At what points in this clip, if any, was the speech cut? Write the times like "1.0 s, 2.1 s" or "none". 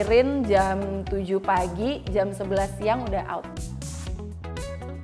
3.5 s